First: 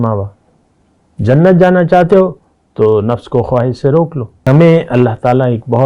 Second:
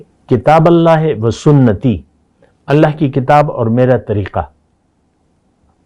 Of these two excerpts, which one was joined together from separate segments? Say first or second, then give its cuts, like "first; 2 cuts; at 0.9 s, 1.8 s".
first; 1 cut; at 4.4 s